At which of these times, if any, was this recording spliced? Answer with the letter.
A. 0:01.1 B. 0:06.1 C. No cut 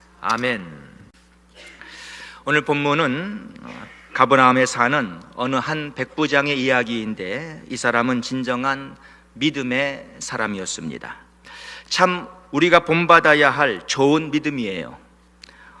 A